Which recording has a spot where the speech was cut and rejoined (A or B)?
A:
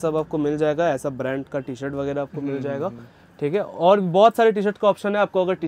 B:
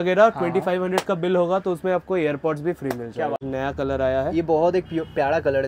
B